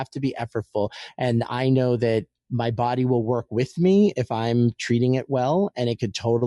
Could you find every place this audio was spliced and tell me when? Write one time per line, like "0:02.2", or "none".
0:01.0